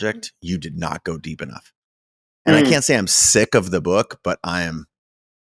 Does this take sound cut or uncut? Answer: uncut